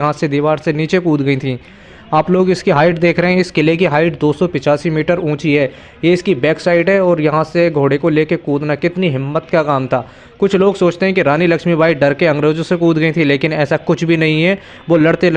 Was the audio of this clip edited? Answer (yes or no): no